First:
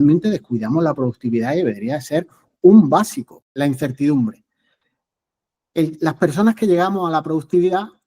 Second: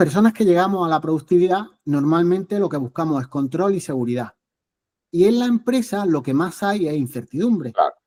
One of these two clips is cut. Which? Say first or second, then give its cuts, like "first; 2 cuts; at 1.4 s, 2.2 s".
first; 1 cut; at 3.5 s